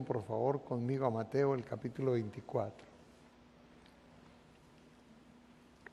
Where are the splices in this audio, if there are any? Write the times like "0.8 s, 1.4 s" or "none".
none